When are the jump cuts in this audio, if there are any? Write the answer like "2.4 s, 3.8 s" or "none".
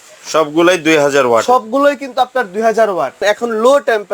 3.2 s